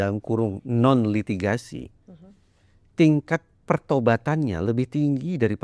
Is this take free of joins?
yes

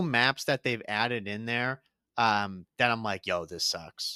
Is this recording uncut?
yes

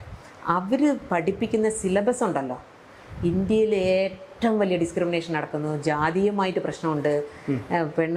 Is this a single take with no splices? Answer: yes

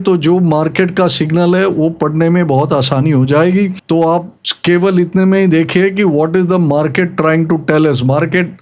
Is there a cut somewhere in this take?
no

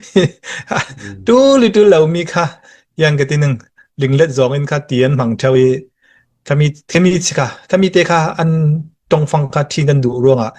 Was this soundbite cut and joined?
no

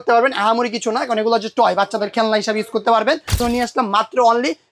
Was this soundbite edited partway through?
yes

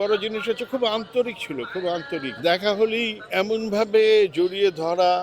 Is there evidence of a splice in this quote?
yes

